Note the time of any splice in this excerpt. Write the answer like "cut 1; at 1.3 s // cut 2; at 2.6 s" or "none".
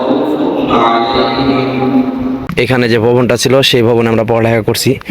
cut 1; at 2.4 s